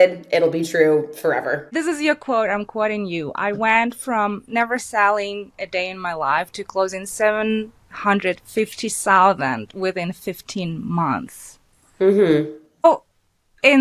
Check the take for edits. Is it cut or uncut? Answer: cut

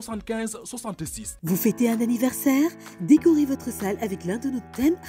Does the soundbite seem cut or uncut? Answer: cut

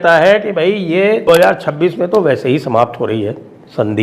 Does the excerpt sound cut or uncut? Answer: cut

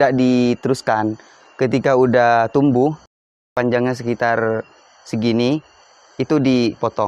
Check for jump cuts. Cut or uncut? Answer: cut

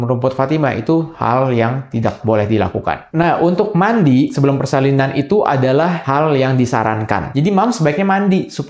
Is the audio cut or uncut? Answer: cut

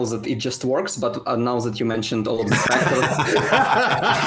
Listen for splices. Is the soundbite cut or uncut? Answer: uncut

